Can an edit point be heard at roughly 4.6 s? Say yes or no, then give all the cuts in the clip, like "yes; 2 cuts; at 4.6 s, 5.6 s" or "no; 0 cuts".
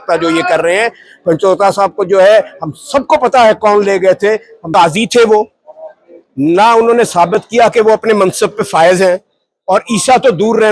yes; 1 cut; at 4.6 s